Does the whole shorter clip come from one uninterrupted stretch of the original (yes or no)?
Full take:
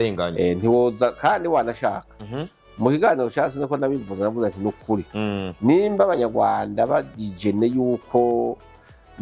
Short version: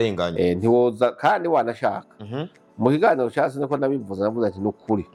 yes